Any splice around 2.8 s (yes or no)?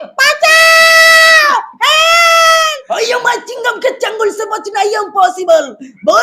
yes